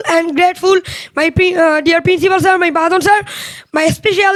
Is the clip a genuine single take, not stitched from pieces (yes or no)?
yes